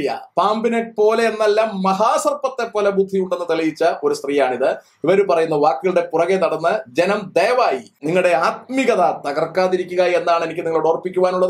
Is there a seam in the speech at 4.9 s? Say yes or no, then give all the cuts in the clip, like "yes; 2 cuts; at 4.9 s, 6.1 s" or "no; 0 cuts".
no; 1 cut; at 8.0 s